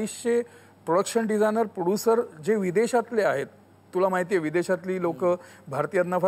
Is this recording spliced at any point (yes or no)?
no